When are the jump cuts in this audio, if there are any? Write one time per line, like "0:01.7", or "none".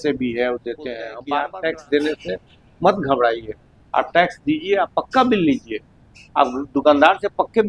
0:01.1